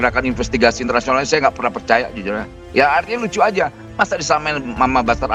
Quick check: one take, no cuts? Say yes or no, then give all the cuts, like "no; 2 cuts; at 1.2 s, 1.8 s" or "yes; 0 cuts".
yes; 0 cuts